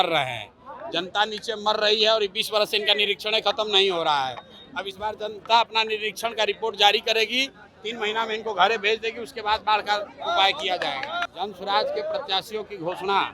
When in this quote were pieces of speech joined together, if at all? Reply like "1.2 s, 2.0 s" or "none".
11.2 s